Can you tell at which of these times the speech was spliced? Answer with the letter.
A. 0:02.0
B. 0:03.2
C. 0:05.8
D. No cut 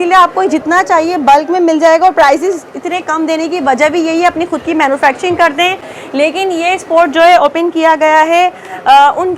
D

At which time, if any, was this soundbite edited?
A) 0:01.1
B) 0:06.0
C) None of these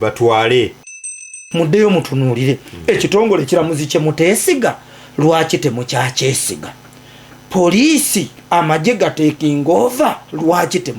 A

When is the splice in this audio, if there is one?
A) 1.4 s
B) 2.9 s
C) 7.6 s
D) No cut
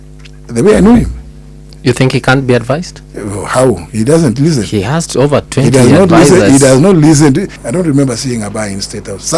C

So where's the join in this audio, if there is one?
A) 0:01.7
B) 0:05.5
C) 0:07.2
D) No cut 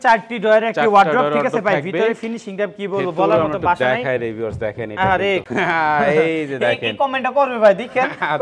B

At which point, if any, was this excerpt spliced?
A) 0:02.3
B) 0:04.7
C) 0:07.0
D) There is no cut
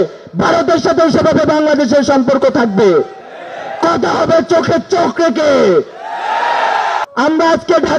C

